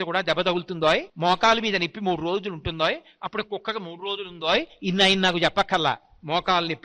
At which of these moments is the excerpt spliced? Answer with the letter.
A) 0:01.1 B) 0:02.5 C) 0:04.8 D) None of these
A